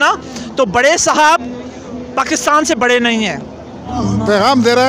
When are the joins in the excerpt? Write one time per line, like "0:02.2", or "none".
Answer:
0:03.9